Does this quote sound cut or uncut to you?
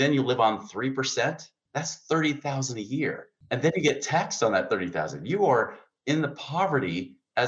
cut